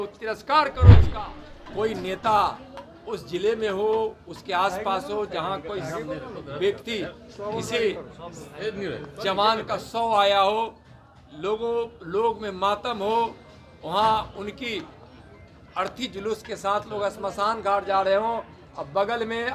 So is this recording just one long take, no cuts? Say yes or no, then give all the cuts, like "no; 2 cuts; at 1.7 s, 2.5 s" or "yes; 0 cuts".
no; 1 cut; at 1.0 s